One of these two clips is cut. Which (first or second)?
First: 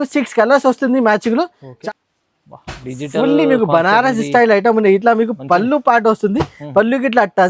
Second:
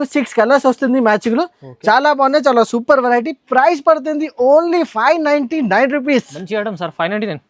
first